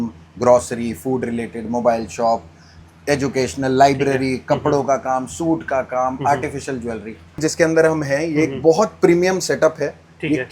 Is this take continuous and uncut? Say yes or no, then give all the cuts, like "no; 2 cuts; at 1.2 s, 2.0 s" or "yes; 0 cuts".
no; 1 cut; at 7.4 s